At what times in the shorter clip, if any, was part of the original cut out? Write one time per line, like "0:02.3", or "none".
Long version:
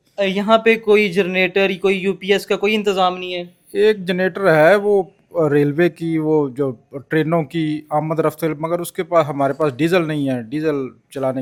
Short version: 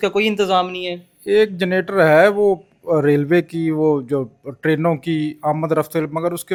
none

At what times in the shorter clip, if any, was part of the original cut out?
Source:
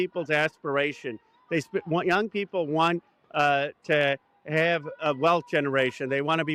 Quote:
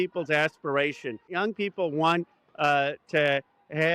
0:01.3

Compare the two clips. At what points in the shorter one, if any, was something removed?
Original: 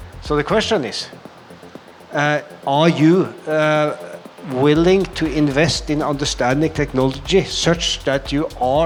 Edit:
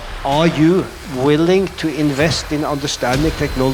0:01.0

